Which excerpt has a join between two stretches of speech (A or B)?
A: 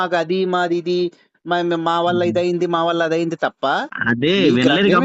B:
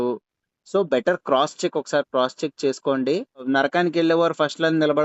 B